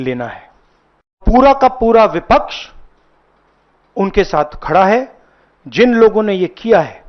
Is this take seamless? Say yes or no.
no